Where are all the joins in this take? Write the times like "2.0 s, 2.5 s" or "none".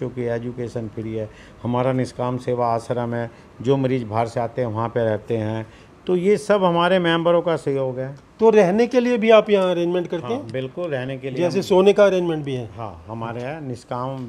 none